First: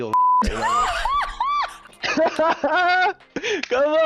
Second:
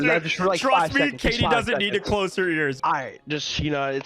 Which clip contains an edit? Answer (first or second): second